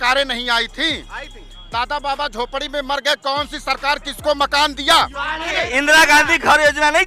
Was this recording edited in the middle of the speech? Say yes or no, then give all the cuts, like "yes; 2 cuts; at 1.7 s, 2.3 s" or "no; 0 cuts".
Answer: yes; 1 cut; at 5.6 s